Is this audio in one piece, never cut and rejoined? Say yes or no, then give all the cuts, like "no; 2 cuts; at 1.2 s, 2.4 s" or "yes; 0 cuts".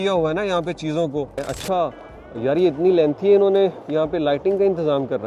no; 1 cut; at 1.4 s